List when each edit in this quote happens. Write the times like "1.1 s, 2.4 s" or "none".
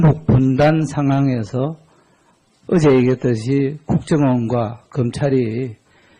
3.1 s